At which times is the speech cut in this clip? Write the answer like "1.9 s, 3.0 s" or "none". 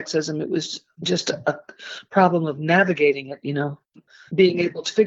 4.1 s